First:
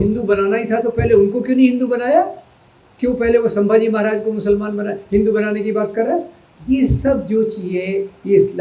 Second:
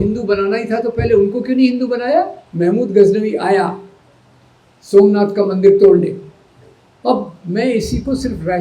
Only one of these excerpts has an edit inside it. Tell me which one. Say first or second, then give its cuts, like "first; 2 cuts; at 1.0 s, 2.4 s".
second; 1 cut; at 2.4 s